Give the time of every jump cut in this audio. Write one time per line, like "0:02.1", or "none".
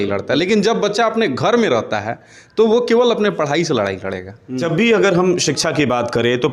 0:04.5